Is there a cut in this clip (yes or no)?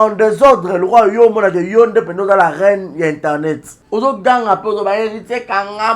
yes